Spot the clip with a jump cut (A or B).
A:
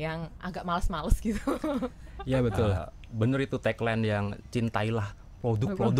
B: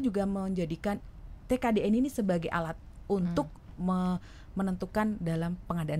A